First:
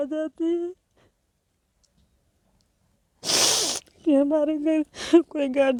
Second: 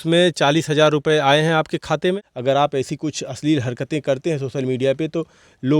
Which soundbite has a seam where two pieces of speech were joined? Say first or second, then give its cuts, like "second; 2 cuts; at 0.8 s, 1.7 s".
second; 1 cut; at 2.2 s